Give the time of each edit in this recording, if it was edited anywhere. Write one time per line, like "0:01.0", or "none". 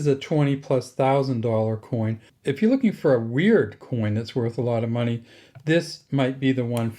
0:02.2